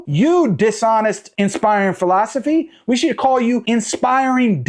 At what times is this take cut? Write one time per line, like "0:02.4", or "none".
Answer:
none

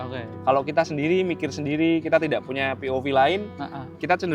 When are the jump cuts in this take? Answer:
none

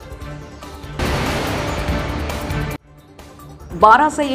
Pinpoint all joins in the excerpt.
0:01.0
0:02.9

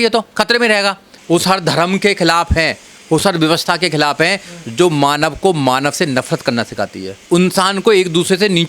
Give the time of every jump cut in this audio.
0:01.1
0:07.2

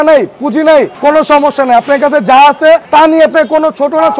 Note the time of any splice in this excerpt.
0:00.9
0:02.9

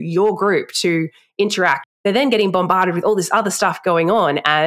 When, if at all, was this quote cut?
0:01.8

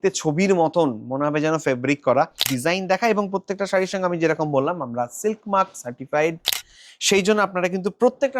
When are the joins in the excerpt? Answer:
0:02.4

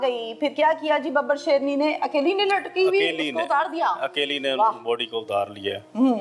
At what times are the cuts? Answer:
none

